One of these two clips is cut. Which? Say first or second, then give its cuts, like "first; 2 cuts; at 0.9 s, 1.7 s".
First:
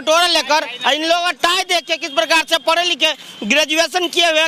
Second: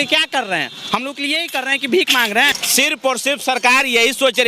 second; 1 cut; at 2.5 s